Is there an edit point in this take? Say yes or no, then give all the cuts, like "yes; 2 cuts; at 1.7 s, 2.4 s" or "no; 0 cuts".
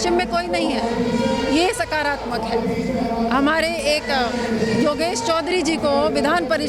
no; 0 cuts